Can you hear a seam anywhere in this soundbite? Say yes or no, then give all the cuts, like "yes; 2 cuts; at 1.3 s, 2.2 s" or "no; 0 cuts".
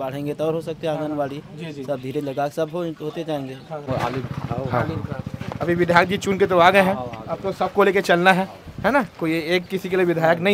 yes; 1 cut; at 3.8 s